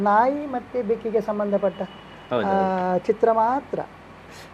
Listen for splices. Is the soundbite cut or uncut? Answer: uncut